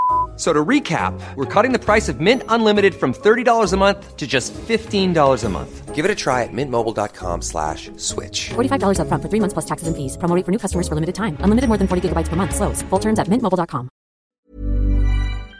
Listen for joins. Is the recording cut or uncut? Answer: cut